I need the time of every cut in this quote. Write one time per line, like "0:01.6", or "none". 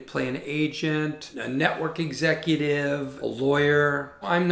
0:01.3

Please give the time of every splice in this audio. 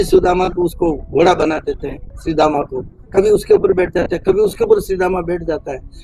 none

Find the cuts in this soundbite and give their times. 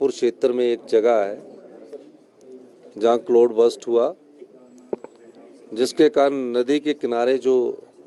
none

